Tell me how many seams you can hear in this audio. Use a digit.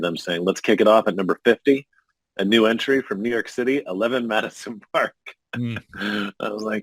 0